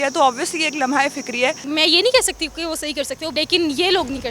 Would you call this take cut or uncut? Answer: cut